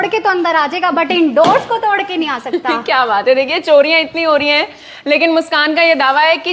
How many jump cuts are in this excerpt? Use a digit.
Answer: 0